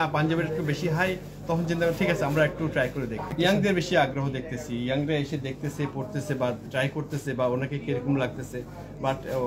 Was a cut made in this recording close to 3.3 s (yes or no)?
yes